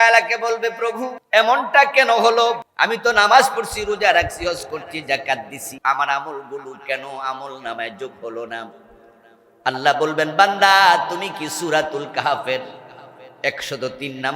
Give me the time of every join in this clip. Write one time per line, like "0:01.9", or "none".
0:01.1
0:02.7
0:05.6